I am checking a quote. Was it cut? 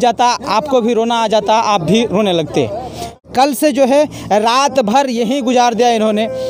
yes; 1 cut; at 3.2 s

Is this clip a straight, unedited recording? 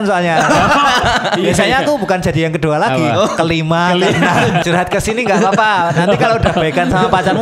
no; 1 cut; at 4.6 s

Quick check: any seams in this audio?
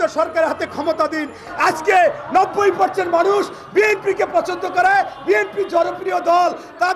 yes; 1 cut; at 1.5 s

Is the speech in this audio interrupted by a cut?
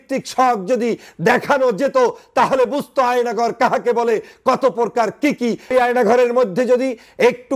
yes; 1 cut; at 5.7 s

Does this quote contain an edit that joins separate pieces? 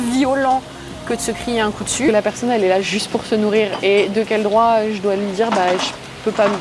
yes; 1 cut; at 2.1 s

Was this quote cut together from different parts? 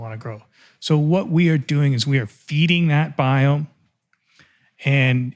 no; 0 cuts

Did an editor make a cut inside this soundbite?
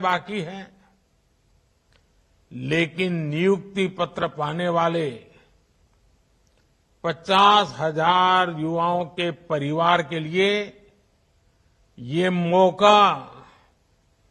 no; 0 cuts

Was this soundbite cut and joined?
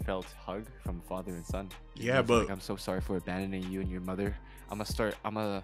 no; 0 cuts

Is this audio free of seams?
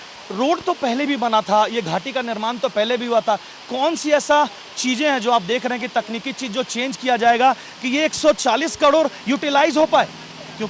yes; 0 cuts

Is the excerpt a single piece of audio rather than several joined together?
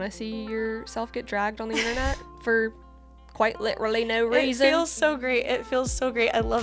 yes; 0 cuts

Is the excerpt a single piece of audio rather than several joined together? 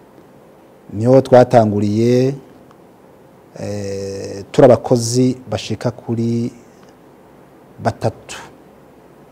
yes; 0 cuts

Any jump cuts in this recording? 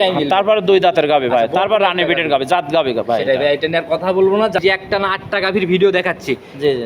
yes; 1 cut; at 4.6 s

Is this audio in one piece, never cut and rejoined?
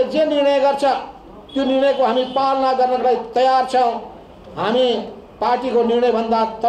yes; 0 cuts

